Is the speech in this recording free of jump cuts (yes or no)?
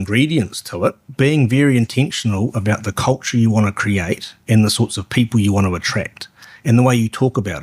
no